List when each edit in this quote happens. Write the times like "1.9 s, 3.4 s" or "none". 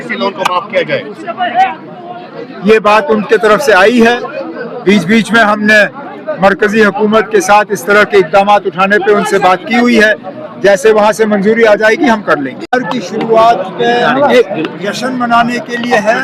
12.6 s